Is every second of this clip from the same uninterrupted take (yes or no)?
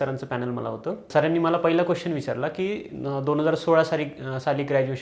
no